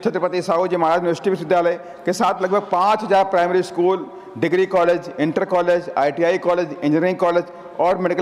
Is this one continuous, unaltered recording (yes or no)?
yes